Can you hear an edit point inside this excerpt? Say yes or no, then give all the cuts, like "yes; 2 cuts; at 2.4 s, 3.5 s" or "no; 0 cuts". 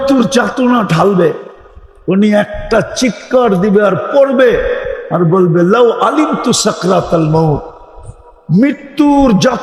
no; 0 cuts